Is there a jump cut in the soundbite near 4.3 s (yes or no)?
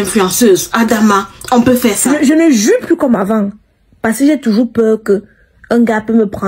no